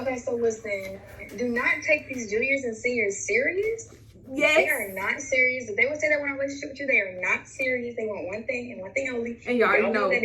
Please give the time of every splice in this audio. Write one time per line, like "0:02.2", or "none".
0:09.4